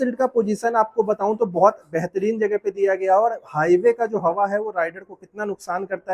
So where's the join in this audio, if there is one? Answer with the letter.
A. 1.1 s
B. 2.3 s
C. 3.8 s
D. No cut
D